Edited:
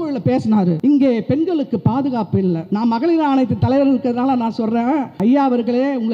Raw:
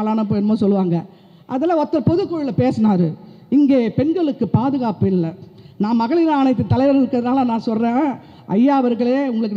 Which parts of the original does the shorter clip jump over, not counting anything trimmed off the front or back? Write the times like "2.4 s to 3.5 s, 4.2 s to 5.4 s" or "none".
3.1 s to 3.5 s, 5.3 s to 5.7 s, 8.2 s to 8.4 s